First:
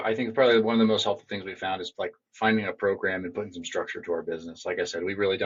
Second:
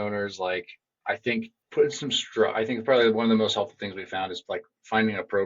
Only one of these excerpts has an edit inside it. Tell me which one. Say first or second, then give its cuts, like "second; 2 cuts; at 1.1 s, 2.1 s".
second; 1 cut; at 1.6 s